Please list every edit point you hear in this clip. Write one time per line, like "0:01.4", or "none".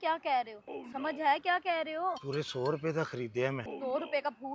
0:00.9
0:02.2
0:03.7